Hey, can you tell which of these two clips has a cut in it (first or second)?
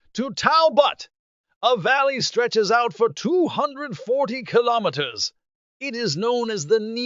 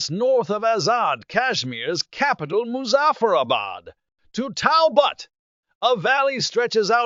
first